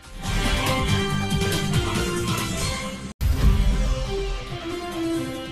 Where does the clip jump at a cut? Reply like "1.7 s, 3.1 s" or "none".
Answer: 0.8 s, 3.1 s